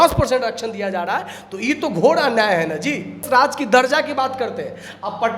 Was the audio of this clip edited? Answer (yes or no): yes